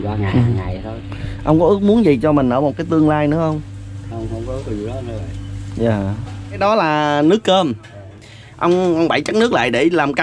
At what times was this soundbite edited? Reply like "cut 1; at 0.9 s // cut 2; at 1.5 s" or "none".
cut 1; at 6.4 s